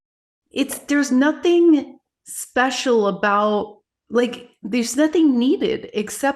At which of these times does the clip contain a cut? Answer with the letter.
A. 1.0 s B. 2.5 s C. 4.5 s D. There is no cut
C